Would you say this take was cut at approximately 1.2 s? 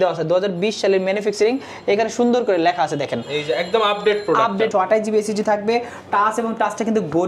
no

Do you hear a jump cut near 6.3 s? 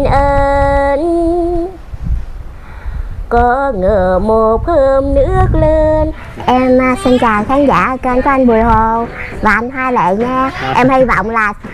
yes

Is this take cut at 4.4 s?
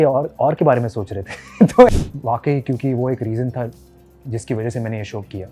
no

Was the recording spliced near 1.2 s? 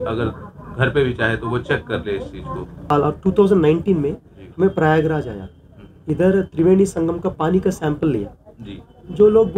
no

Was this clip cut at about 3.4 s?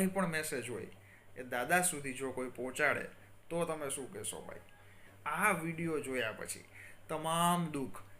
no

